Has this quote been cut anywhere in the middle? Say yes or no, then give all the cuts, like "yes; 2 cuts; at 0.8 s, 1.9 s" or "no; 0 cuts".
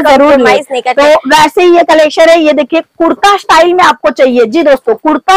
no; 0 cuts